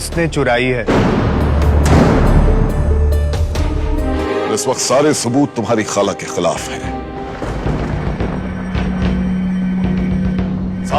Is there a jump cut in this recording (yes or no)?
yes